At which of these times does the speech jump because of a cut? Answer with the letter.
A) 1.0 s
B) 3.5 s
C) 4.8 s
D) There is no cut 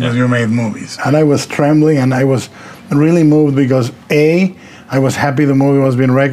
A